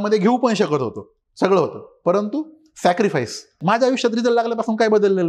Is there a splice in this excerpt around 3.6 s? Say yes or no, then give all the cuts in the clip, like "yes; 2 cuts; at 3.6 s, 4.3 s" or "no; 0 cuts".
yes; 1 cut; at 3.6 s